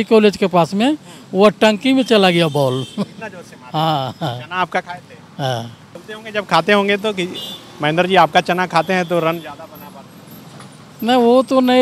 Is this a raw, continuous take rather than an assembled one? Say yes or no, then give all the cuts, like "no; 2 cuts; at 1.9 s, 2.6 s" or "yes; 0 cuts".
yes; 0 cuts